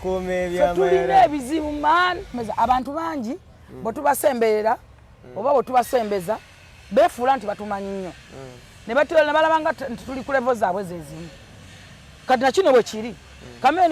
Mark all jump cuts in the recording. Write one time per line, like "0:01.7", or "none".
0:02.4